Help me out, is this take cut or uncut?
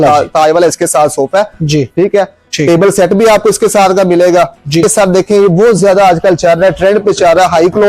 cut